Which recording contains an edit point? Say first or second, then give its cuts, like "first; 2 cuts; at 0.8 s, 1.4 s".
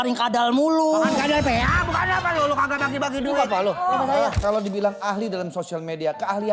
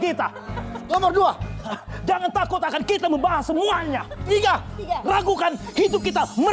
first; 1 cut; at 4.4 s